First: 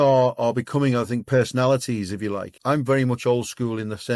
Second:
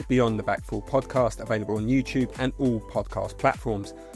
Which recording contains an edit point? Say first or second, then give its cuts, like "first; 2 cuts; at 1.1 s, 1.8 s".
first; 2 cuts; at 1.2 s, 2.5 s